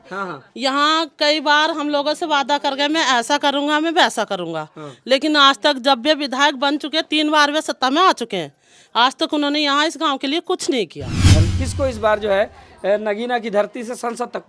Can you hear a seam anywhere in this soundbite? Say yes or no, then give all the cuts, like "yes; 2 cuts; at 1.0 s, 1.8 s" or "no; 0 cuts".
yes; 1 cut; at 11.3 s